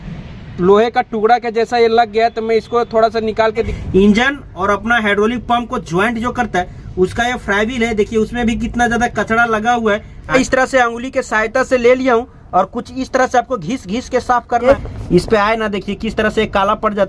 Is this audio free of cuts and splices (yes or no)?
no